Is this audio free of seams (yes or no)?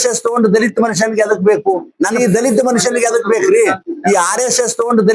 no